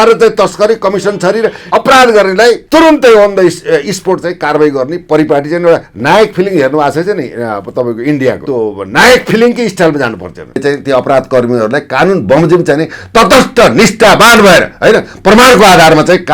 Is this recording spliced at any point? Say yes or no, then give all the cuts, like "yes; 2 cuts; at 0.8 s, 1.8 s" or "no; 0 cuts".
yes; 4 cuts; at 1.6 s, 2.6 s, 8.4 s, 10.6 s